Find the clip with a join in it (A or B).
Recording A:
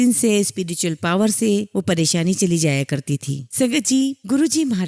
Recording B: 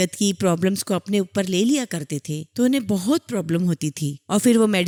A